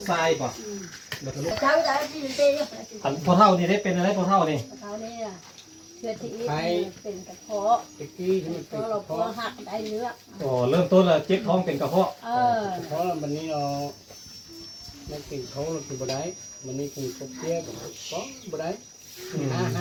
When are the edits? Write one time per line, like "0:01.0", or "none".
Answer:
none